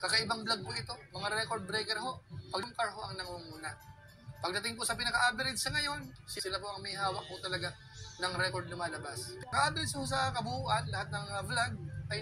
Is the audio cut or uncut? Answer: cut